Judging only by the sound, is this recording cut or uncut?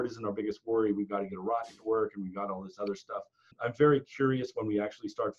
cut